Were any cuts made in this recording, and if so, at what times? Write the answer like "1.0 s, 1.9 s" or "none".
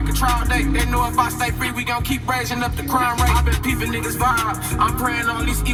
none